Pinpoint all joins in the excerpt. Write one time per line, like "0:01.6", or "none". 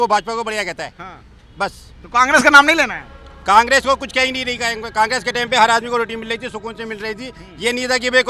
none